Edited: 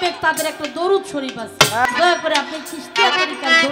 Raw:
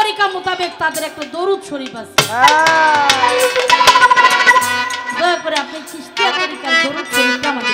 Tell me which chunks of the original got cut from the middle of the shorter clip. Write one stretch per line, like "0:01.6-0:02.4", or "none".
0:02.4-0:05.0